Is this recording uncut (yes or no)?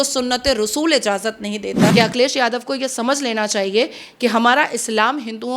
no